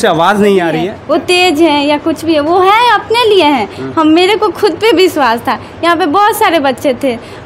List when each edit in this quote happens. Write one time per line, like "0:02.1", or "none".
0:00.9